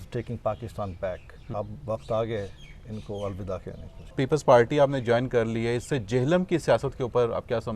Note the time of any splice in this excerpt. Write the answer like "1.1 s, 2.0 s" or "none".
1.4 s, 4.1 s